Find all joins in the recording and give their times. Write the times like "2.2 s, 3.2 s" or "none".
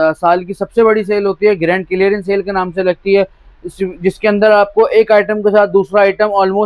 none